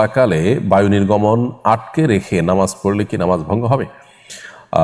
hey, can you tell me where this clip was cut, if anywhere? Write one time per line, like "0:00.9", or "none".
none